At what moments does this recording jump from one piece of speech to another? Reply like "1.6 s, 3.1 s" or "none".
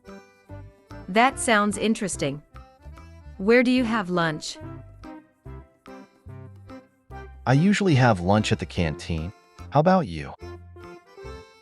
1.1 s, 4.5 s, 6.1 s, 7.4 s, 10.4 s